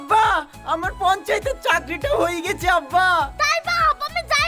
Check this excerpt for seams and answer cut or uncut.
uncut